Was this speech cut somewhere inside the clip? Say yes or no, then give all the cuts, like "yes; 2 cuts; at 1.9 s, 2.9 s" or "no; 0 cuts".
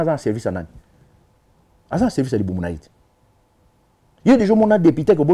no; 0 cuts